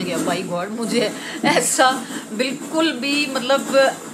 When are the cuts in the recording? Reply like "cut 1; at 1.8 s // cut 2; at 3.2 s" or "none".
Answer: none

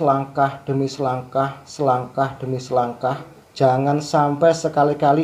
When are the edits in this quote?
cut 1; at 3.4 s

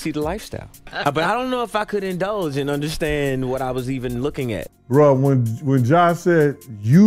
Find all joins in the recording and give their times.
cut 1; at 0.8 s // cut 2; at 4.7 s

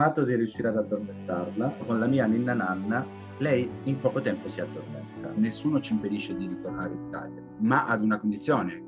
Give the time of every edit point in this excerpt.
cut 1; at 5.4 s

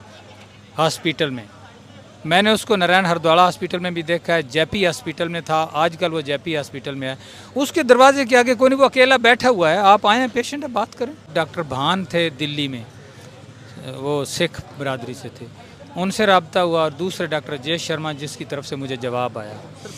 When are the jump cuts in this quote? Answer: cut 1; at 11.3 s

